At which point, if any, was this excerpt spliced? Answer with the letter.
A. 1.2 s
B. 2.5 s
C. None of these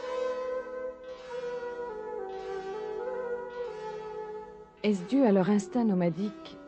B